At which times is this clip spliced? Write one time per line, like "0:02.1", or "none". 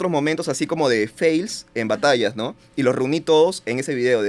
none